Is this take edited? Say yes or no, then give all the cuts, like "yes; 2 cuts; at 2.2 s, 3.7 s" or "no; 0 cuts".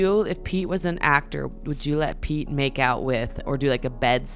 no; 0 cuts